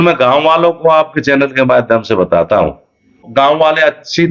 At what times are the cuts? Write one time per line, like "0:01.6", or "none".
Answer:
0:03.2